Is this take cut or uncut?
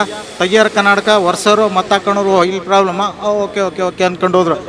uncut